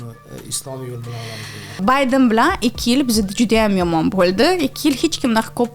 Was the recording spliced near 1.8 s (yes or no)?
yes